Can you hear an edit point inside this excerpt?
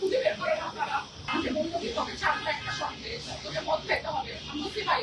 yes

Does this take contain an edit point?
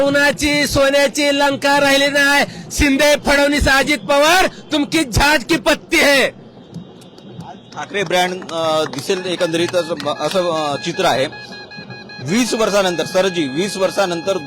no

